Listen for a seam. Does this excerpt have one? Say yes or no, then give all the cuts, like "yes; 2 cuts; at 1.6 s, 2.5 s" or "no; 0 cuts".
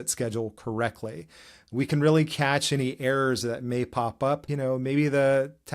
yes; 1 cut; at 4.5 s